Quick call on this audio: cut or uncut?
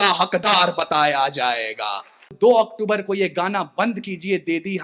cut